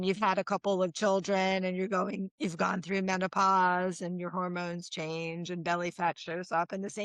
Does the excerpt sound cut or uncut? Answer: uncut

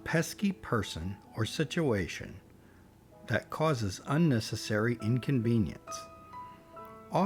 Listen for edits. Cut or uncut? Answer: uncut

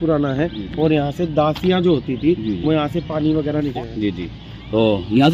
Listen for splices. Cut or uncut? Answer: cut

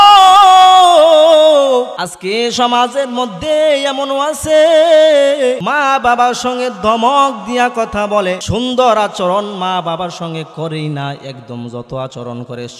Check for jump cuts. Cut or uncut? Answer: cut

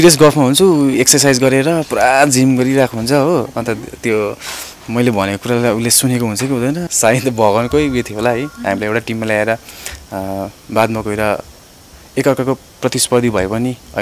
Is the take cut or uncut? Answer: cut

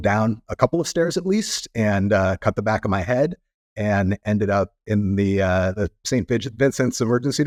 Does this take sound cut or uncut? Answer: uncut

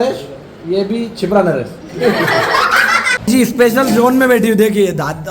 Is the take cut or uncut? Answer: cut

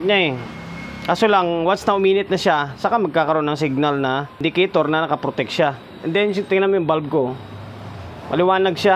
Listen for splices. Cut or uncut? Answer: cut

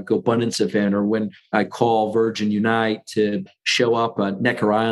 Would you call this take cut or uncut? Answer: uncut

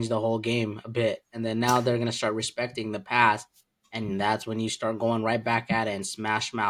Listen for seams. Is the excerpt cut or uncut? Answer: uncut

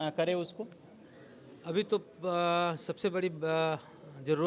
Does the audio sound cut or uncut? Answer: uncut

